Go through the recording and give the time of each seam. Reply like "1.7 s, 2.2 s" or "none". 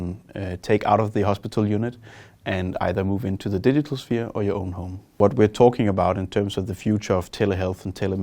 5.1 s